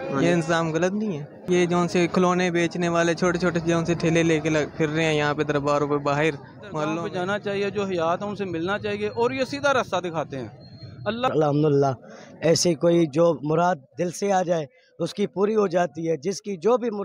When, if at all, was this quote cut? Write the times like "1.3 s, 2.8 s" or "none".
1.5 s, 6.9 s, 11.3 s